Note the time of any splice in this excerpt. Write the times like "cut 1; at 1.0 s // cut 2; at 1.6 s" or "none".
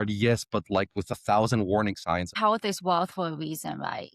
cut 1; at 2.3 s